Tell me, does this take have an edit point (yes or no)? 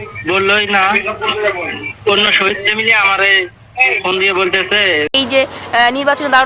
yes